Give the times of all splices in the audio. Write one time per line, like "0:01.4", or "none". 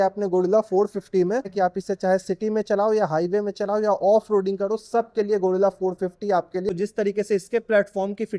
0:01.5
0:06.7